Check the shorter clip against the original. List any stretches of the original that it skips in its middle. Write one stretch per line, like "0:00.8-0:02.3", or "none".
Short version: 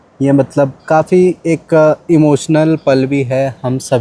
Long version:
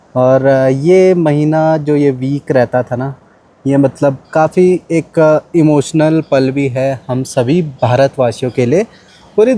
none